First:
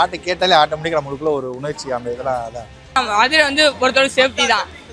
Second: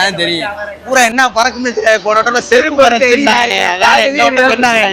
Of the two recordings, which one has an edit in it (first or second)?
first